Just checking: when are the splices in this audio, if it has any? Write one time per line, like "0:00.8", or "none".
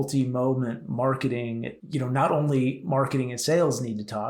0:01.8